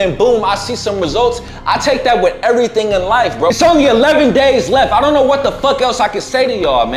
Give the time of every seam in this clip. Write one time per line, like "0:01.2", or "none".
0:03.5